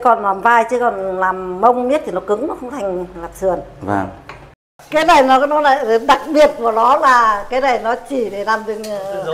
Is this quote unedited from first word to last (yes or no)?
no